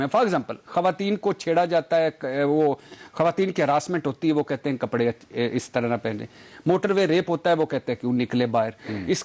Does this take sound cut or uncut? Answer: uncut